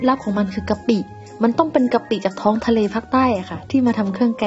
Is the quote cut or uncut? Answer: uncut